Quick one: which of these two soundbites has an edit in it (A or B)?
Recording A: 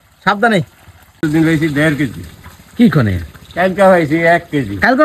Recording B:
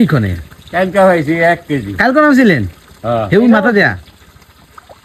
A